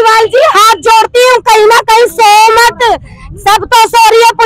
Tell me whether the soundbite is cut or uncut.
uncut